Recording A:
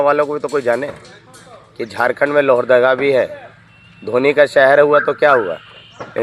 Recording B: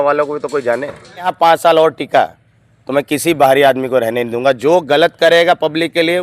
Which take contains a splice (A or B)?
B